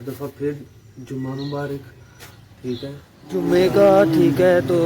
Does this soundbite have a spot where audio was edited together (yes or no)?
yes